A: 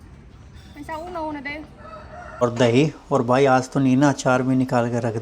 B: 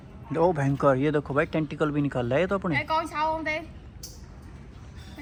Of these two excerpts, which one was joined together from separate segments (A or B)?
A